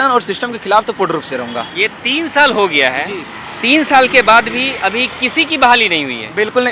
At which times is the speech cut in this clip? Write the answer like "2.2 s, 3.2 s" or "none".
none